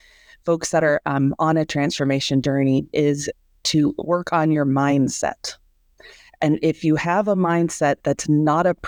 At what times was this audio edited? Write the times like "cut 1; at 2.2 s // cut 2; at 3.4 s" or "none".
none

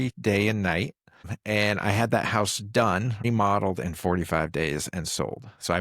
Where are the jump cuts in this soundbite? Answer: cut 1; at 1.3 s // cut 2; at 3.2 s

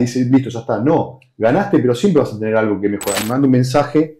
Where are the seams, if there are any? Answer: cut 1; at 3.1 s

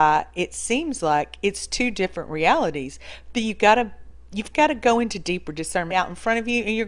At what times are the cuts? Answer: none

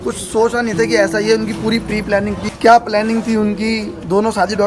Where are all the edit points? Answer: none

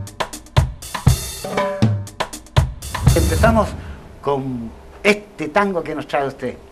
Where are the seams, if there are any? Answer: cut 1; at 2.8 s

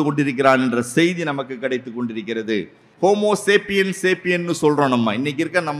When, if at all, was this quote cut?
cut 1; at 2.8 s

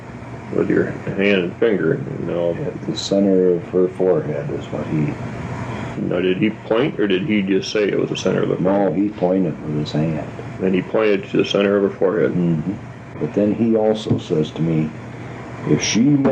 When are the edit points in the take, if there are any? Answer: cut 1; at 13.2 s

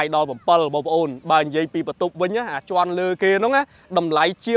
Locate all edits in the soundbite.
none

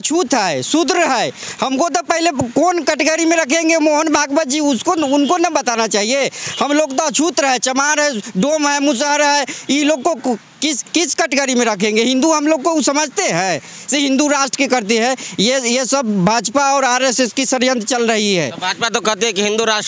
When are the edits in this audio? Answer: none

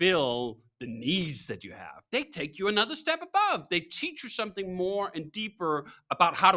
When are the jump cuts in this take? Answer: none

